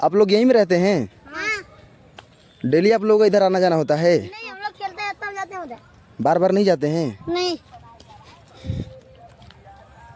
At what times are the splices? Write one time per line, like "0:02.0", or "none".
none